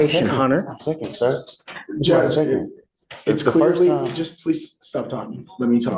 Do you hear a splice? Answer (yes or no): no